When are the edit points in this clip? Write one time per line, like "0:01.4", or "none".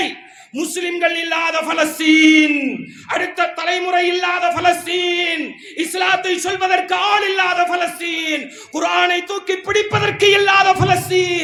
none

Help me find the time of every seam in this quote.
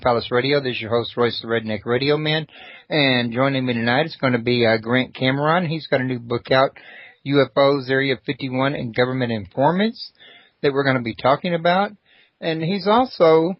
none

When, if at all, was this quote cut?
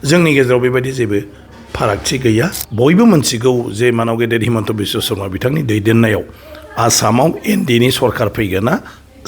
0:02.6

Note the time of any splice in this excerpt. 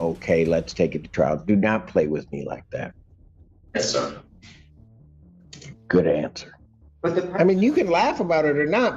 0:06.9

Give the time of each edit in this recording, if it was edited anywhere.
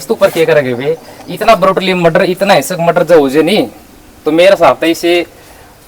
none

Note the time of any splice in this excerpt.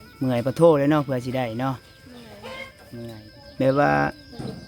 0:03.2

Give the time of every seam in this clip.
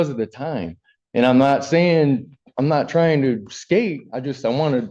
none

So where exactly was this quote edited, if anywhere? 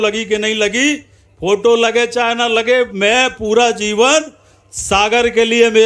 none

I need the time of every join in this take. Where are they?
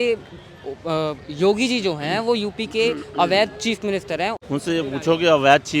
0:04.4

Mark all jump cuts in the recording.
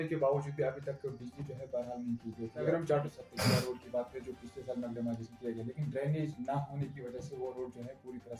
0:02.7

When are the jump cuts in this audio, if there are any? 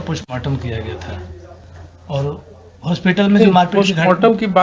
none

